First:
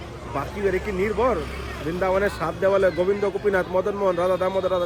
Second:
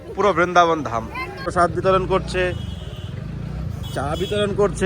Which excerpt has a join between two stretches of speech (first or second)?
second